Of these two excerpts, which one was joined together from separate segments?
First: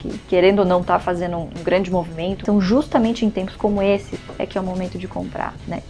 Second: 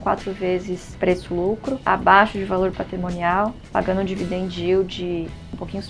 first; 3 cuts; at 1.5 s, 2.4 s, 4.1 s

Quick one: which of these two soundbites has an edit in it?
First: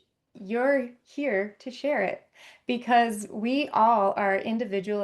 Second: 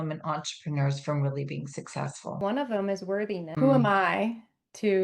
second; 2 cuts; at 2.4 s, 3.5 s

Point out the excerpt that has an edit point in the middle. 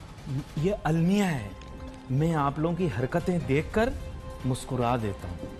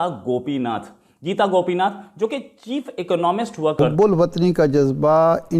second; 1 cut; at 3.8 s

